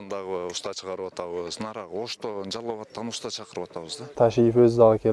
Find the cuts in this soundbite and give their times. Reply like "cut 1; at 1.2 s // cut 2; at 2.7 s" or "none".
cut 1; at 4.1 s